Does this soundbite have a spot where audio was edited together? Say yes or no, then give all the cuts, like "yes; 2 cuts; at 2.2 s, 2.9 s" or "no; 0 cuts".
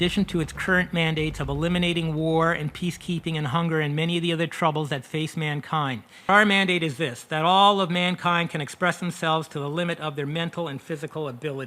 yes; 1 cut; at 6.3 s